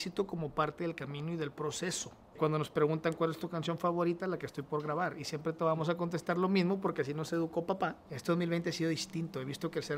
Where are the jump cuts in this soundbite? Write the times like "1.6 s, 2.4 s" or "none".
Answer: 2.4 s, 8.1 s